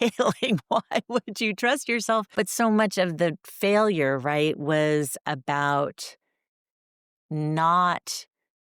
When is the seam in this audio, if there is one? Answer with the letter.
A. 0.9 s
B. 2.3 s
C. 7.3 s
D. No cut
B